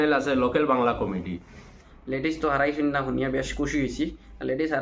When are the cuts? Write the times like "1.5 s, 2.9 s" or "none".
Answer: 1.8 s